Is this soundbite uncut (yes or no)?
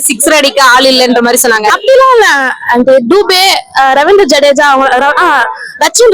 yes